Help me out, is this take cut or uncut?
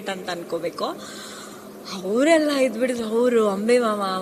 uncut